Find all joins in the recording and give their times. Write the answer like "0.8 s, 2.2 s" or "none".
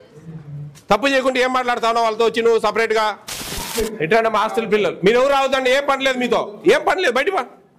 3.6 s

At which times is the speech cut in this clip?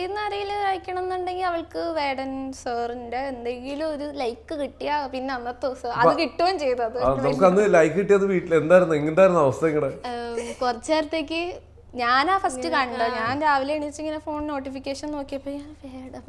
none

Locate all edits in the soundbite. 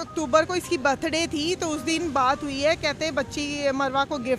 none

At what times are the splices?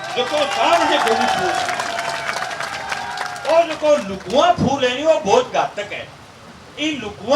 none

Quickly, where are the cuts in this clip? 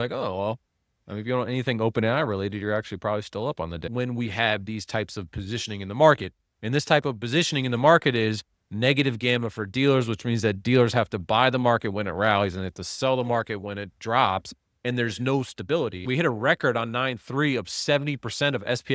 3.9 s, 16.0 s

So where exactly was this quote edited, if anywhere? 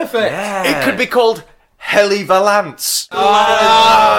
3.1 s

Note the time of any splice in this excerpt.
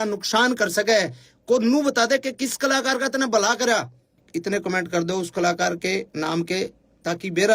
4.2 s

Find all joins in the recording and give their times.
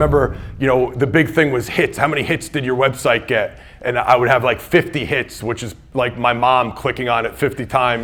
none

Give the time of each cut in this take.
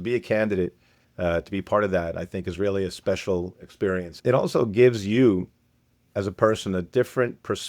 4.1 s

